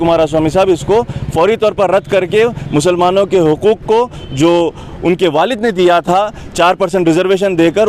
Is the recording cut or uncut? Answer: uncut